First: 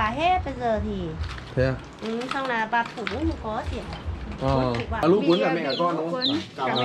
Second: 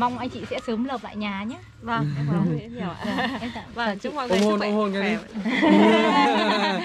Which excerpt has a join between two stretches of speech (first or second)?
first